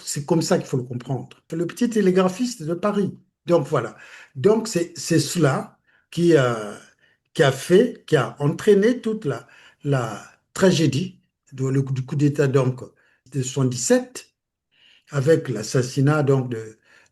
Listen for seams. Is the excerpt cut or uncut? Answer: cut